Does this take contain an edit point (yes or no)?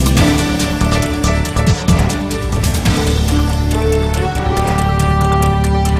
no